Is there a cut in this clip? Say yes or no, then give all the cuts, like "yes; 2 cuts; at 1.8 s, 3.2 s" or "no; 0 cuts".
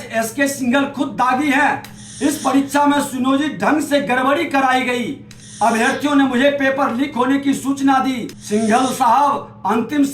yes; 1 cut; at 8.3 s